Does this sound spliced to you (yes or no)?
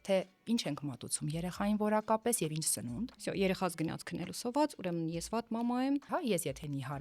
yes